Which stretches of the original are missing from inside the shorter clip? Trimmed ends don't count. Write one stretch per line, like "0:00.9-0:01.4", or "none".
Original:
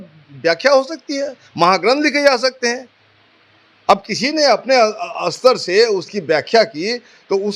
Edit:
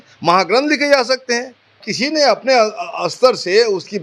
0:03.2-0:04.1